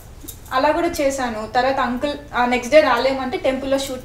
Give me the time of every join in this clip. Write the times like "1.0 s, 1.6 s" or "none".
none